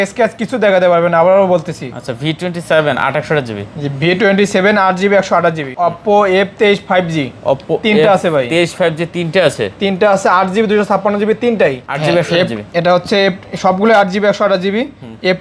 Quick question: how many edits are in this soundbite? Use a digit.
2